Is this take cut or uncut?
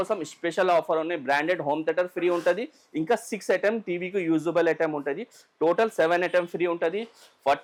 uncut